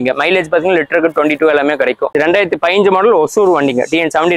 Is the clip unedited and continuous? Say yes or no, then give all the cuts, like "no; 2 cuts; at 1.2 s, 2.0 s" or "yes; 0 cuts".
no; 1 cut; at 2.1 s